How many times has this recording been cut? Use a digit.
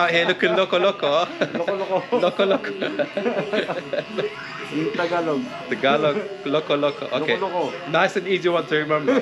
0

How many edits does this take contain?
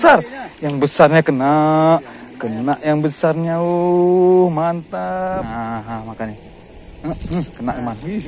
1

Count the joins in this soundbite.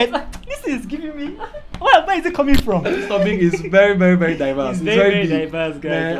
1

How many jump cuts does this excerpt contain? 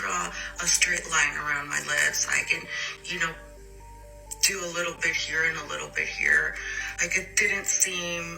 0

